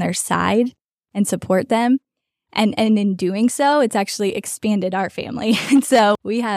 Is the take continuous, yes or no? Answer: yes